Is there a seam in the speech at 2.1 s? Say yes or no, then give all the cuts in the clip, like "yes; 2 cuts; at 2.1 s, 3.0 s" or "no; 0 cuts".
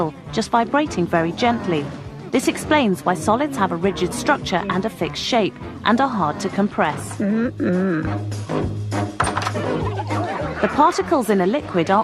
no; 1 cut; at 9.1 s